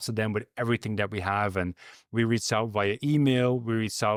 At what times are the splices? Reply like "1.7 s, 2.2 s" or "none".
none